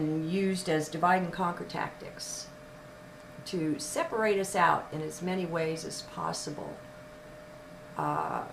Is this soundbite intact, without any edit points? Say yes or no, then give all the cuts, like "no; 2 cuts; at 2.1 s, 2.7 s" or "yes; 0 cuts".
no; 1 cut; at 7.3 s